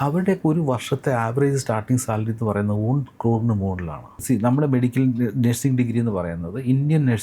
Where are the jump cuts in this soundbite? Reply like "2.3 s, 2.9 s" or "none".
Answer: 4.2 s